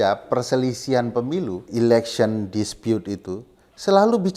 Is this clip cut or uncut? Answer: cut